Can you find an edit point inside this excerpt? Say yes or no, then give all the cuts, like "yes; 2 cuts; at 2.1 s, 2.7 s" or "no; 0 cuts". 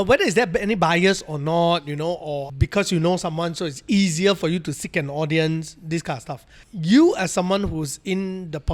no; 0 cuts